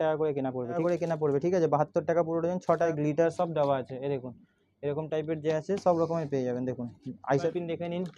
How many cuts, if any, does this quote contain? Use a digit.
3